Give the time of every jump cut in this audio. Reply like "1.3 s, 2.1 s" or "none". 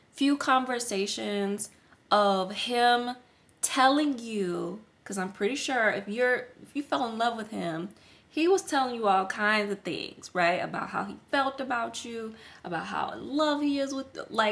none

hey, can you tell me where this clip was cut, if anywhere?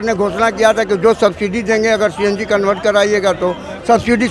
none

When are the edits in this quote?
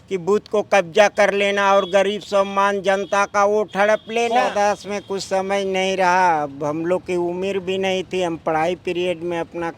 4.4 s

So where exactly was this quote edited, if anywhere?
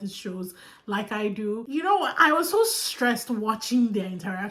1.6 s

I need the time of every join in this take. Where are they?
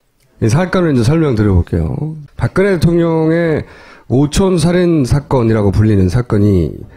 2.0 s

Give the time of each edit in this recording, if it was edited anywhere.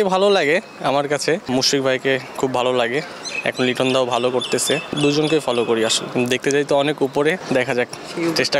1.4 s, 4.9 s, 6.0 s, 7.4 s

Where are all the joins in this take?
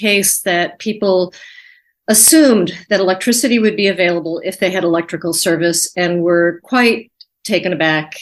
none

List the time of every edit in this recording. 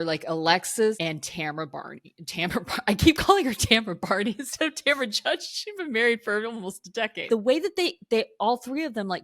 1.0 s, 7.2 s

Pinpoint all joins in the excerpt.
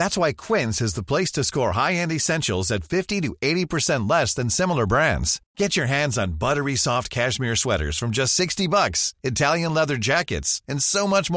none

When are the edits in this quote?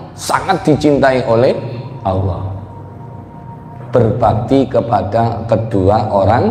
none

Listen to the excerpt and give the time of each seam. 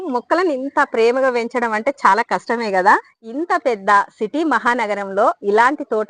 3.1 s

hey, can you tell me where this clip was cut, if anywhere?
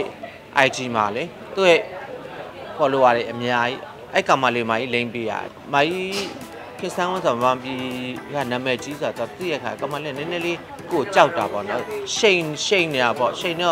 5.4 s

